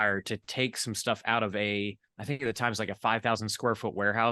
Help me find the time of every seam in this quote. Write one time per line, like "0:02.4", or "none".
0:02.1